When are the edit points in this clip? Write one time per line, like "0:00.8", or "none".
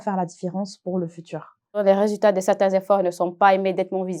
0:01.8